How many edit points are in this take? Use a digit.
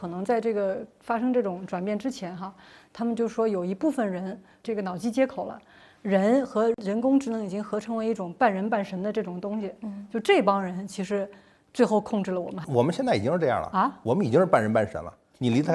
0